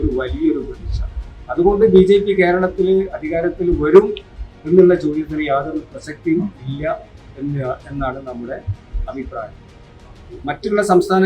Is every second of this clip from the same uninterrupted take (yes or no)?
yes